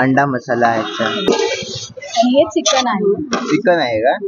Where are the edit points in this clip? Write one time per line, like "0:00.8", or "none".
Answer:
0:01.2